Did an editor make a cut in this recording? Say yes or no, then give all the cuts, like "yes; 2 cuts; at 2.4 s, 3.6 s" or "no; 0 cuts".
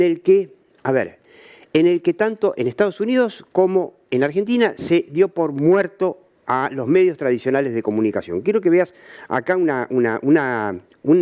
no; 0 cuts